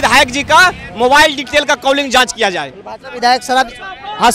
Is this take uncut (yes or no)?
yes